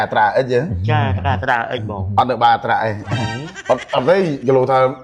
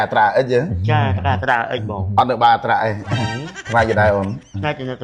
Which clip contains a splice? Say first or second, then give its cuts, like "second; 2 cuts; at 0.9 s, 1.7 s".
second; 1 cut; at 3.6 s